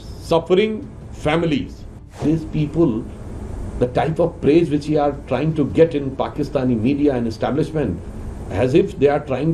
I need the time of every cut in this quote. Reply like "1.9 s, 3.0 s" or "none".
2.2 s